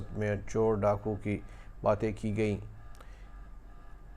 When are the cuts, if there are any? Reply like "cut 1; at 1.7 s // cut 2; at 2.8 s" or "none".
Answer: none